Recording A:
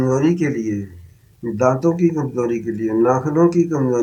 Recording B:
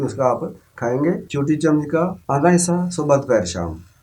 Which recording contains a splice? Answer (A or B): B